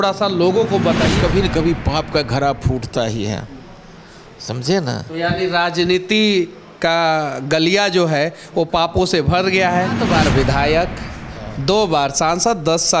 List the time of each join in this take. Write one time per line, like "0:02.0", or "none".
0:01.1
0:10.0